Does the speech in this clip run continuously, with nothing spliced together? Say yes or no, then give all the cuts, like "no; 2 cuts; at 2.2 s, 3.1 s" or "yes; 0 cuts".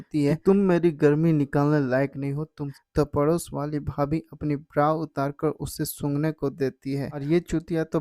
no; 2 cuts; at 2.7 s, 7.2 s